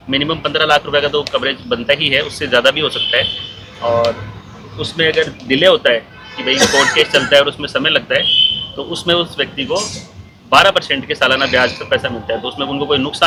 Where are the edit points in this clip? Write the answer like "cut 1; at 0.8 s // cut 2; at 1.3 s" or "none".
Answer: none

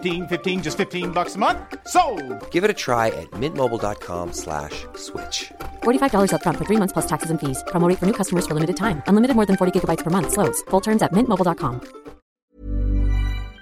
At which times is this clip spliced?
cut 1; at 12.4 s

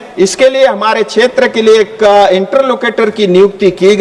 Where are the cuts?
cut 1; at 1.3 s

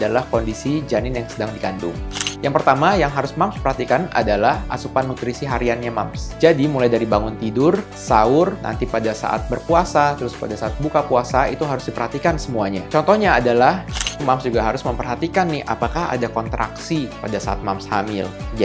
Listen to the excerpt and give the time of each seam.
cut 1; at 2.1 s // cut 2; at 8.6 s // cut 3; at 10.3 s // cut 4; at 14.2 s

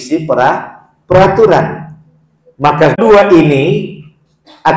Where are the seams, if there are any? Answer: cut 1; at 3.0 s

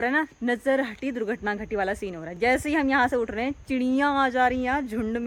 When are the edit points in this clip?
none

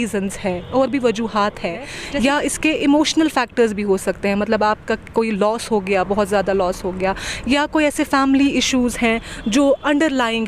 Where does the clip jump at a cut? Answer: cut 1; at 2.0 s

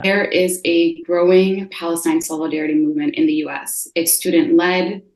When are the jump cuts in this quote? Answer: none

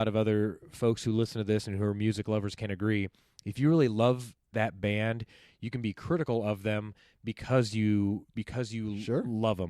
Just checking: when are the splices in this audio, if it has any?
none

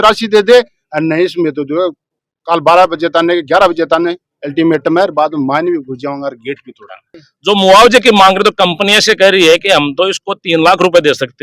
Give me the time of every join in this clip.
cut 1; at 6.9 s

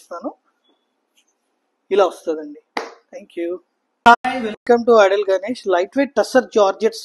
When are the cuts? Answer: cut 1; at 4.2 s

